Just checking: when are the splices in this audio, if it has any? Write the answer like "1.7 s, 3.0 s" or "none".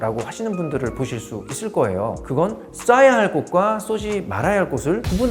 none